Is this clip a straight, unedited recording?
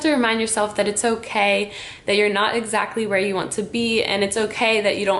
yes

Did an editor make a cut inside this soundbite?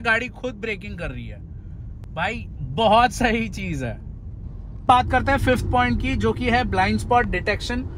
no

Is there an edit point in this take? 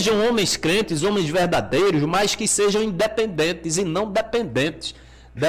no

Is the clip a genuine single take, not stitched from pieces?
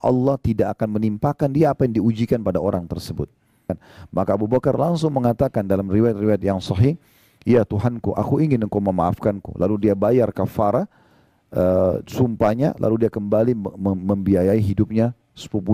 no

